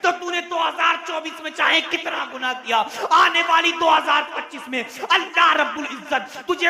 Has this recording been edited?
no; 0 cuts

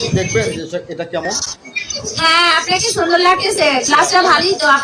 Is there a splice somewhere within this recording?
no; 0 cuts

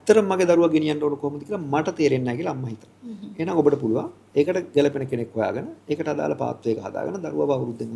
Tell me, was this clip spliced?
no; 0 cuts

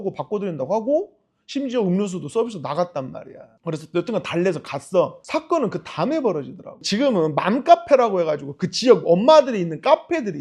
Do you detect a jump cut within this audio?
no; 0 cuts

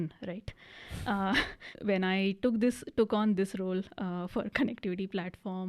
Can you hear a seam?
yes; 1 cut; at 1.7 s

